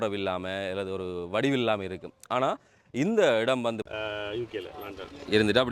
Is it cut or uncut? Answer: cut